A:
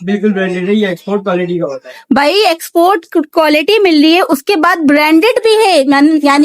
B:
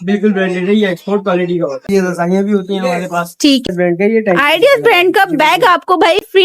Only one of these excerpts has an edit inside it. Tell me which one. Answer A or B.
B